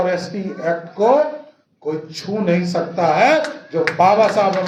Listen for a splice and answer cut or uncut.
uncut